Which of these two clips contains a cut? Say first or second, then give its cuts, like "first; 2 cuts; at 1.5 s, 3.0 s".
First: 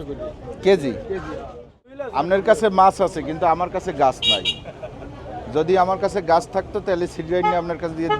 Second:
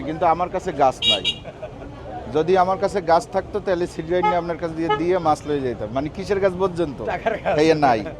first; 1 cut; at 2.0 s